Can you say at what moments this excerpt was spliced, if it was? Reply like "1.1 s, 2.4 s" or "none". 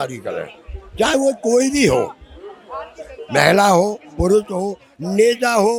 none